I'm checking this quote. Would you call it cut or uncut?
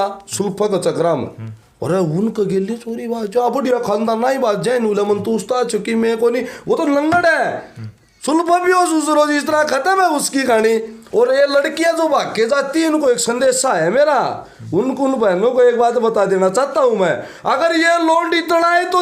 cut